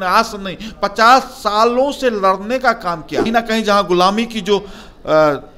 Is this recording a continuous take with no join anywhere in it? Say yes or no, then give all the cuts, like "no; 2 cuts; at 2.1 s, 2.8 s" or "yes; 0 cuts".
no; 1 cut; at 3.3 s